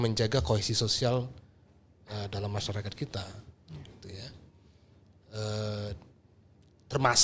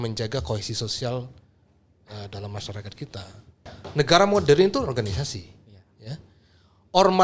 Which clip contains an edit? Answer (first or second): second